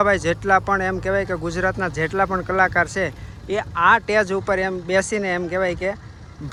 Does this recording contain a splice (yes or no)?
no